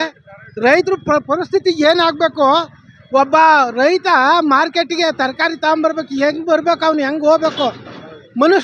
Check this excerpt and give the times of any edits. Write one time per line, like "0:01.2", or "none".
none